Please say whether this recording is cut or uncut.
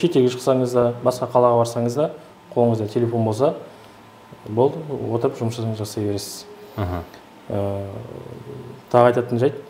uncut